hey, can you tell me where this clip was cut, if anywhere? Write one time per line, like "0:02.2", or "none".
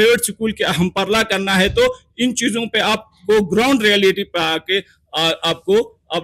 none